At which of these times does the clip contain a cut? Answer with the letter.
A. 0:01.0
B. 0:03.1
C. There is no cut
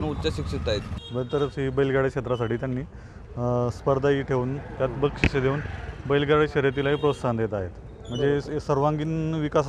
A